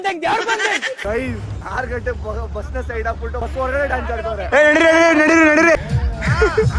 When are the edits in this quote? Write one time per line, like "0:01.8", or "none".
0:01.0
0:04.4
0:05.8